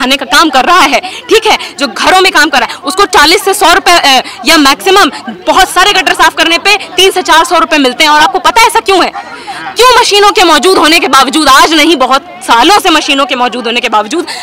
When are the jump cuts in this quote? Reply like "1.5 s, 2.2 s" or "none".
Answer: none